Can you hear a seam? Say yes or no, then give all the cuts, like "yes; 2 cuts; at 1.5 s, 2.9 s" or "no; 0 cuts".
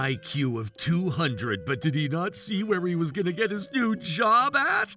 no; 0 cuts